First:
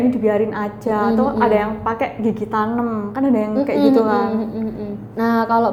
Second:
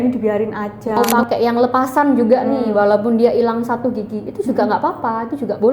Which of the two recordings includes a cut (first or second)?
second